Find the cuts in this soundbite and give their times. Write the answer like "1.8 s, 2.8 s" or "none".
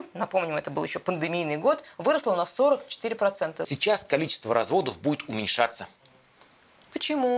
3.7 s